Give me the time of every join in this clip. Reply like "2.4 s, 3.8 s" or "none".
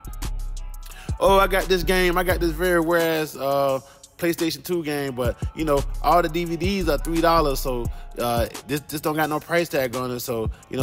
1.2 s

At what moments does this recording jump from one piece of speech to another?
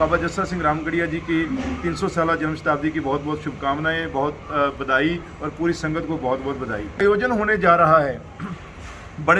7.0 s

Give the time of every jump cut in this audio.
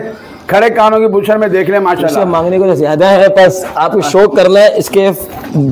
2.2 s

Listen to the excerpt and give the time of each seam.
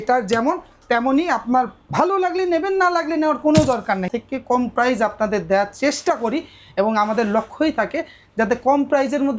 4.1 s

